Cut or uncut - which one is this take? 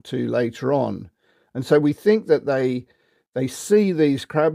uncut